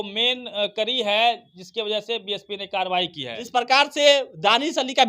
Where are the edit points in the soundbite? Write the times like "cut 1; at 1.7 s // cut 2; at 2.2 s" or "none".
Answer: cut 1; at 3.3 s

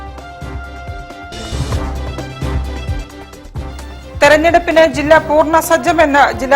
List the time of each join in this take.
none

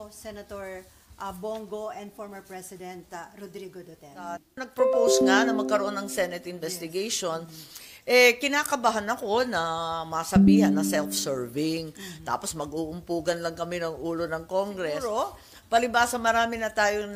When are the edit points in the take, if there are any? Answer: cut 1; at 4.6 s // cut 2; at 15.0 s

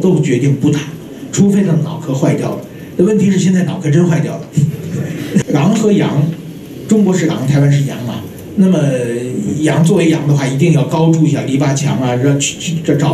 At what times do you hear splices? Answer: cut 1; at 5.4 s

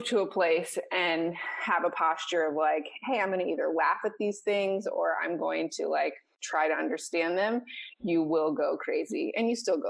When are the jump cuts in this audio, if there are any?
none

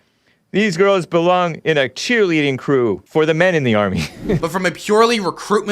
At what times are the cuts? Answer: cut 1; at 3.0 s // cut 2; at 4.4 s

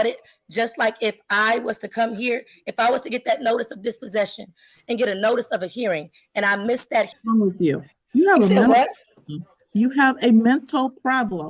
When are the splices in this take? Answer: cut 1; at 7.2 s

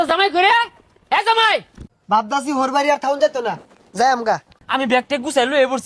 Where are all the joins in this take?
cut 1; at 1.8 s // cut 2; at 4.5 s

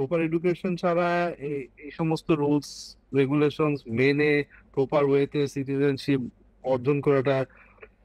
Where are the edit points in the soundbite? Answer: none

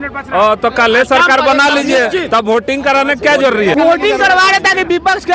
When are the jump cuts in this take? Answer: cut 1; at 3.7 s

